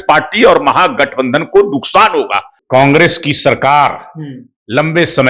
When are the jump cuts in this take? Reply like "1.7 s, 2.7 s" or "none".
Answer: 2.5 s